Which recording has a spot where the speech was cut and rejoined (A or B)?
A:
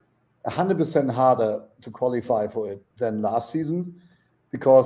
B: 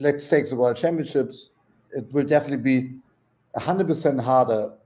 A